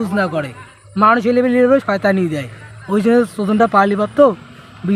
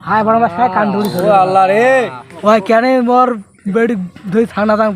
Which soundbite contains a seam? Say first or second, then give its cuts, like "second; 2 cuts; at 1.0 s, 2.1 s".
second; 1 cut; at 2.2 s